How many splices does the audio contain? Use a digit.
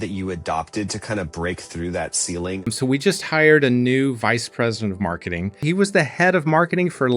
2